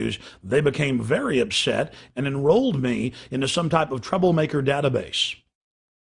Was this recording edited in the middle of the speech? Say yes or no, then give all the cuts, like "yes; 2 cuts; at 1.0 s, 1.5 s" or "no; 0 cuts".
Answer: yes; 1 cut; at 3.9 s